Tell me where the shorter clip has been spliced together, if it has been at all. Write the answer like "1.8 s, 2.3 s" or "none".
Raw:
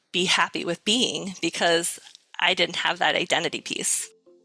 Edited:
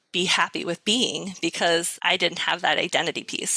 1.9 s